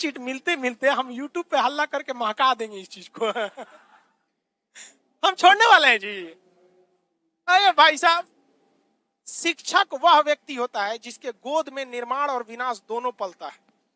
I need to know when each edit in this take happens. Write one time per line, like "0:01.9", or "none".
none